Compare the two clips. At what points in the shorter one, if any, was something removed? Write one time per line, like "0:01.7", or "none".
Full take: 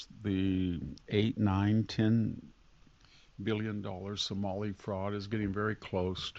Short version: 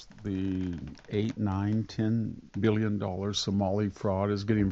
0:02.4